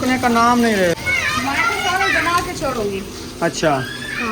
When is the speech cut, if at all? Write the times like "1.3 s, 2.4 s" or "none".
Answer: 0.9 s